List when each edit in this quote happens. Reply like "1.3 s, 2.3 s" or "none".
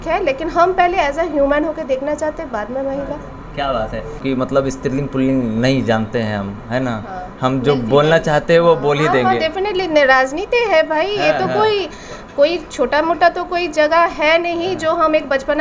4.2 s